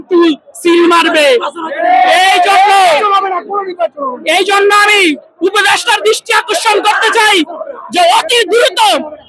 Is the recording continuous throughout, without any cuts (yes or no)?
yes